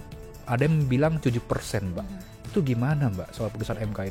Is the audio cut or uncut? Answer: uncut